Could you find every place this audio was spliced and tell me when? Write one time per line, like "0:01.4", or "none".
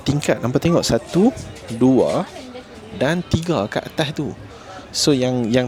none